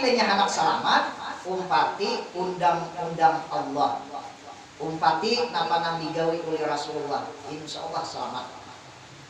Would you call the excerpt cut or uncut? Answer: uncut